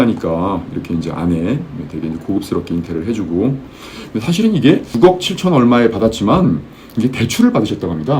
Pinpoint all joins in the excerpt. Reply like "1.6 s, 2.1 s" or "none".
4.9 s

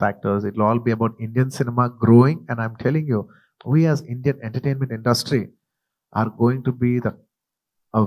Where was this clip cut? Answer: 3.5 s

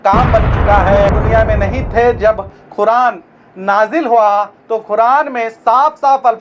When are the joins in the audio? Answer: 1.2 s

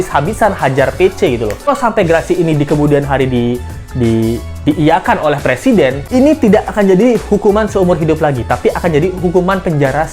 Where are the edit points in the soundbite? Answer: 1.7 s, 6.0 s

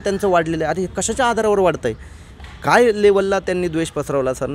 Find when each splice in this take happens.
none

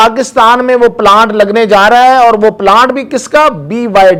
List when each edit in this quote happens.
none

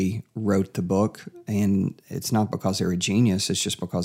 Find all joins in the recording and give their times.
none

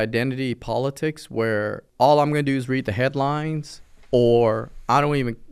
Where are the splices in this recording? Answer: 1.8 s

